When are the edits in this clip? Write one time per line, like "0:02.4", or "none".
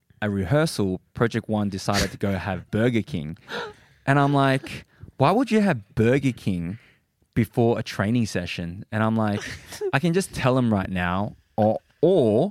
none